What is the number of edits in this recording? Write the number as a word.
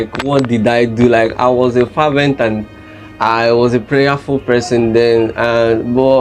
zero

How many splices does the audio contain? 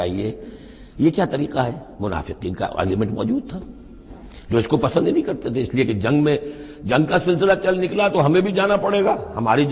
zero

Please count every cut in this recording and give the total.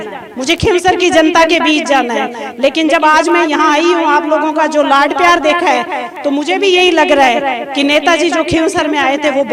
zero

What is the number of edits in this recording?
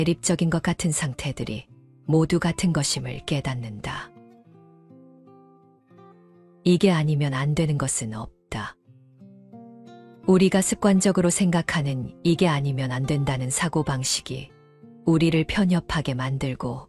zero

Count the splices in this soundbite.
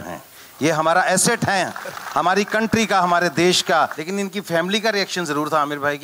one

